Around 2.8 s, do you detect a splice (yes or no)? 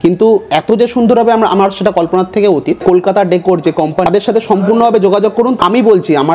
yes